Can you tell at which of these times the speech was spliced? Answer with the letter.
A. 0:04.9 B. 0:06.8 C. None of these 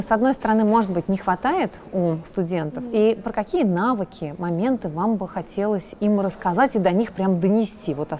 C